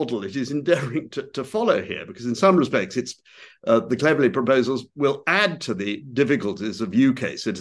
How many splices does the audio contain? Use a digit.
0